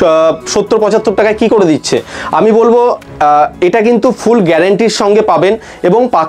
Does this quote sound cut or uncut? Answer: uncut